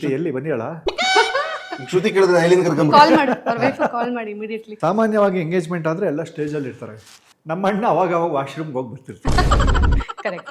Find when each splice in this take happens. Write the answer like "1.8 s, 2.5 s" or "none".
4.6 s

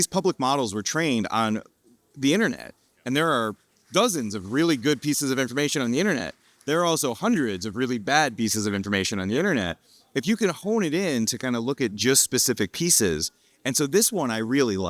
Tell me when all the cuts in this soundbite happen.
none

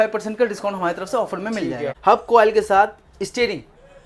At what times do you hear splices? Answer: 1.9 s

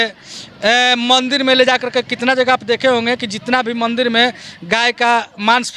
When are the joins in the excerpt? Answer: none

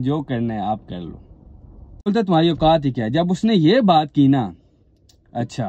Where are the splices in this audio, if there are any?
2.1 s

